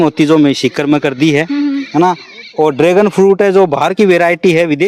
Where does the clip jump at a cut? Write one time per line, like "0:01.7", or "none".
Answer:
none

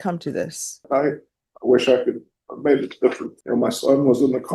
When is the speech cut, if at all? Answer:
0:00.8
0:03.3

